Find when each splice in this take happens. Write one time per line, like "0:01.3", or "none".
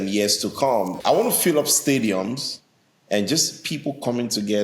0:01.0